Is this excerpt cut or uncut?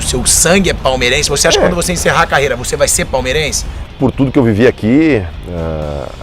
cut